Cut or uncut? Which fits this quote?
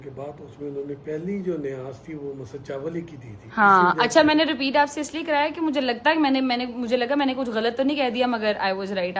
uncut